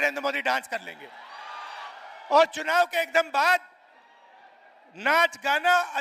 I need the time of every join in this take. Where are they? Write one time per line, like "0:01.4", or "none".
0:01.9